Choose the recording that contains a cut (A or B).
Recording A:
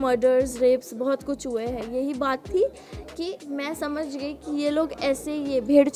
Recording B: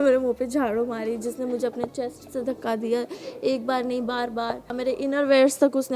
B